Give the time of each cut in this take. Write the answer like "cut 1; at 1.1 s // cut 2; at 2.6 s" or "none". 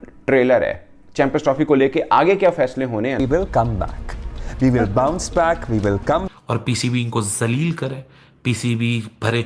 cut 1; at 3.2 s // cut 2; at 6.3 s

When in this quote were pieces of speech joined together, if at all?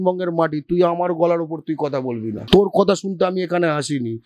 cut 1; at 2.4 s

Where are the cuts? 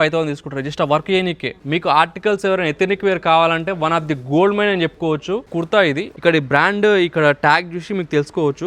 cut 1; at 1.6 s // cut 2; at 5.7 s

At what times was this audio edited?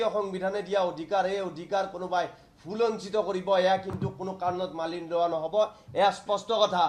none

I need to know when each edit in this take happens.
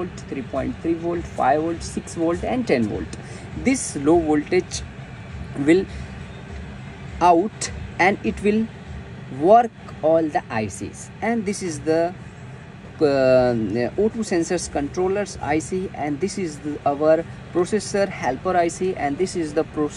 none

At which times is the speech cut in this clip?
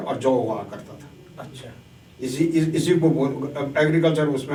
none

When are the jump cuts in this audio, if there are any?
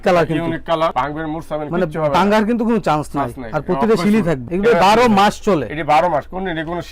cut 1; at 0.9 s // cut 2; at 4.4 s

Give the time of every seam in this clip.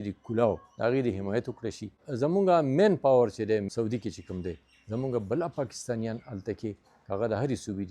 cut 1; at 2.0 s // cut 2; at 3.7 s

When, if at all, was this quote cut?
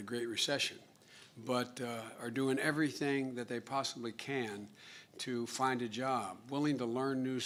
none

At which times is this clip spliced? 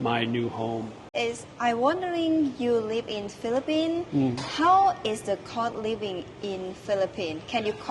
cut 1; at 1.0 s

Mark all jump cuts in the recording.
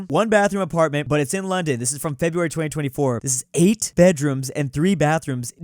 cut 1; at 3.9 s

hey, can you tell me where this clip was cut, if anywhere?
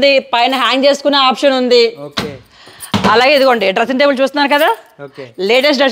none

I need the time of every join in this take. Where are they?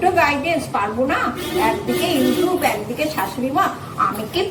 none

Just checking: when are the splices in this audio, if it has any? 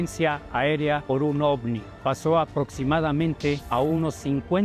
cut 1; at 1.0 s // cut 2; at 1.9 s // cut 3; at 3.6 s

